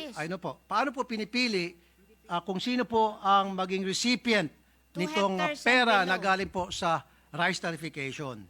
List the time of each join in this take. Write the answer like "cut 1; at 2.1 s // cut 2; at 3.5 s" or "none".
none